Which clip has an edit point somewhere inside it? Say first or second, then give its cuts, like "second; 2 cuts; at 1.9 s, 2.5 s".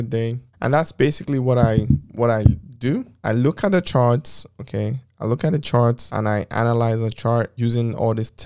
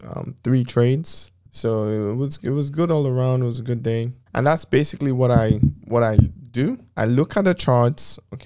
first; 1 cut; at 7.5 s